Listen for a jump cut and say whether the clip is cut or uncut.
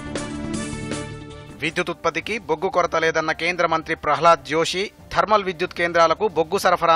cut